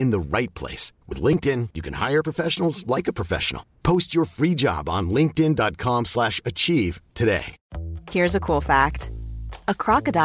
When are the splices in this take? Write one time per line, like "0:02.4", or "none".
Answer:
0:07.6